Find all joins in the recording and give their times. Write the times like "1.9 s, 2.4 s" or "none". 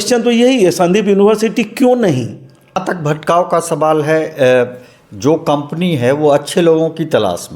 2.8 s